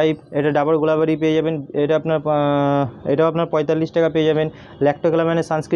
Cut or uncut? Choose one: uncut